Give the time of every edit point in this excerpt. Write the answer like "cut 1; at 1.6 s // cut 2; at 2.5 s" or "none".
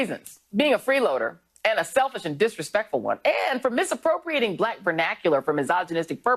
cut 1; at 3.4 s